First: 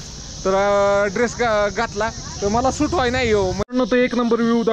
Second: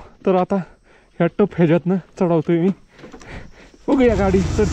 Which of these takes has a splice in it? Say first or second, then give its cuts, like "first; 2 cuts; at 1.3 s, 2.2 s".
first; 1 cut; at 3.6 s